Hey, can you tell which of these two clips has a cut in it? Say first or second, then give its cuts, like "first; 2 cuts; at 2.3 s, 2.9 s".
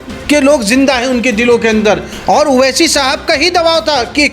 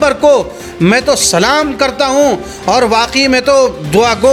first; 1 cut; at 2.1 s